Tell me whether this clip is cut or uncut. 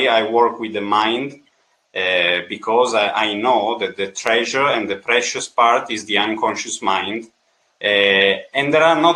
uncut